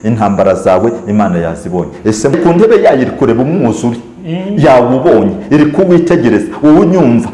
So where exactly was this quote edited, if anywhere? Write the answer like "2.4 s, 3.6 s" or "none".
2.4 s